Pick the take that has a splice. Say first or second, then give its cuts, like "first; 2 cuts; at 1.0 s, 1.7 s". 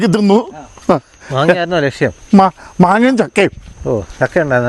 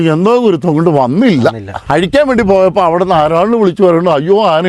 second; 1 cut; at 1.7 s